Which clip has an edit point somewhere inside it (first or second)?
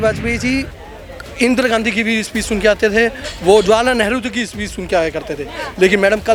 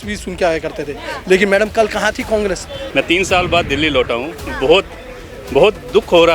second